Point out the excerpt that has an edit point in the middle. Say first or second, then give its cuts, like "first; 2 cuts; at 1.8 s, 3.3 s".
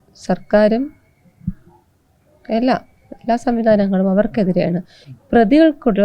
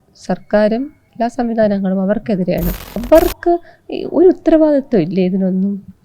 second; 2 cuts; at 1.0 s, 3.0 s